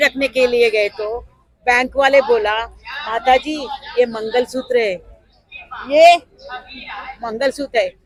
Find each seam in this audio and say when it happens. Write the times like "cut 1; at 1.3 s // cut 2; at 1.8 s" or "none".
none